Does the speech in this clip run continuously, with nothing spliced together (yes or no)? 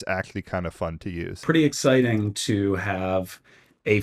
no